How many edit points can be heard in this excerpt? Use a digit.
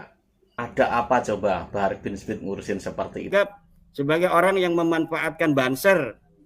1